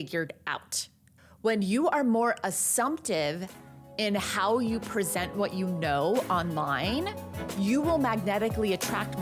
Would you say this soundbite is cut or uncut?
uncut